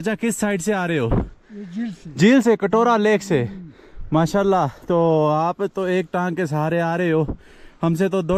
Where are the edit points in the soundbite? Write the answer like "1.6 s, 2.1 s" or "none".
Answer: none